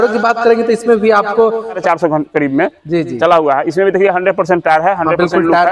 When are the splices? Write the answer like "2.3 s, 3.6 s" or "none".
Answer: 1.8 s